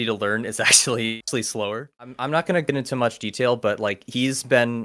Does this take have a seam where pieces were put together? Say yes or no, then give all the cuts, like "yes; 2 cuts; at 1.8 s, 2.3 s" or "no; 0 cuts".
yes; 1 cut; at 2.1 s